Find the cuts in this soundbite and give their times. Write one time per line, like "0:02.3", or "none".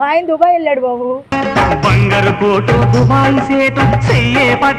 none